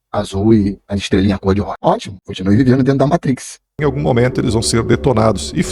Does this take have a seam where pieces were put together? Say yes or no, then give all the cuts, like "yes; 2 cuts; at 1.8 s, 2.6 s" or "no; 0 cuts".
yes; 1 cut; at 3.8 s